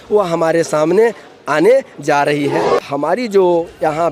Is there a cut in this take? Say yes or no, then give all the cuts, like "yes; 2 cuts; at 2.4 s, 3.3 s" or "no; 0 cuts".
yes; 1 cut; at 2.8 s